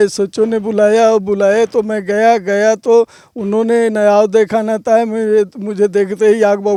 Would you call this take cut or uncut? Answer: uncut